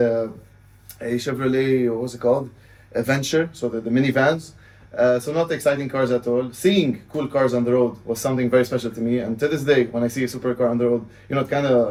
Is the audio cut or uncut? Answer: uncut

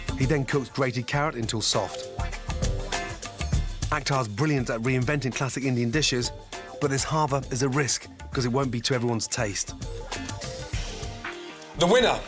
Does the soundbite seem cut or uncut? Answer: cut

